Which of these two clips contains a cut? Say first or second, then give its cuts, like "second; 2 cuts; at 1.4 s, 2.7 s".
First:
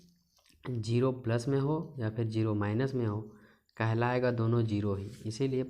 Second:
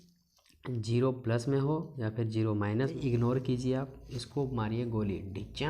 second; 1 cut; at 3.0 s